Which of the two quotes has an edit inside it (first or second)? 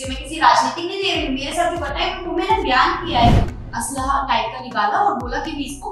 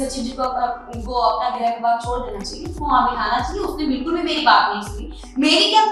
first